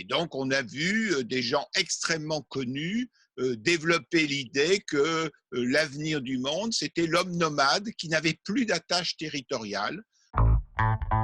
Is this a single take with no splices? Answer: no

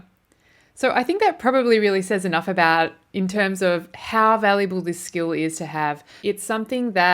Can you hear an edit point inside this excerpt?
yes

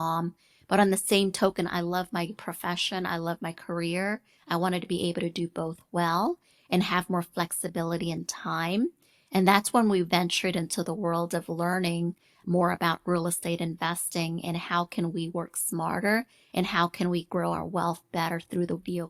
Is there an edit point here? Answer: no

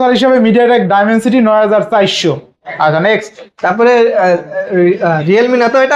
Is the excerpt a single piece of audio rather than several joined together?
yes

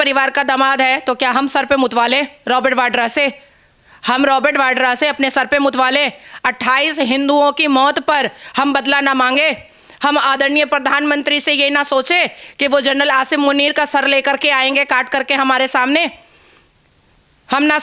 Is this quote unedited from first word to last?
yes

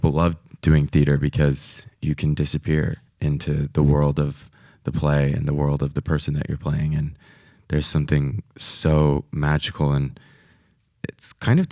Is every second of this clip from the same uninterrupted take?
no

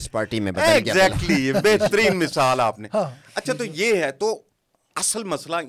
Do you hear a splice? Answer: no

